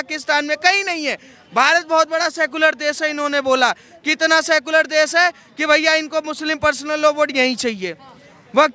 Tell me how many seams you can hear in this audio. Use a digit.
0